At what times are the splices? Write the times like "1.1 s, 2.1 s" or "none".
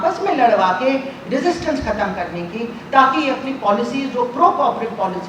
none